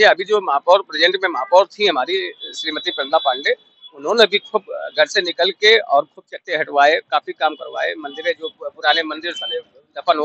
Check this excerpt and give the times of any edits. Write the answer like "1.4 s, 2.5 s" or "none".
none